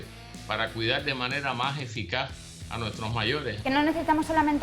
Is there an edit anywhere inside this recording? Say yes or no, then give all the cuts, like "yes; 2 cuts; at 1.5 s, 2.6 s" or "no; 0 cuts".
yes; 1 cut; at 3.6 s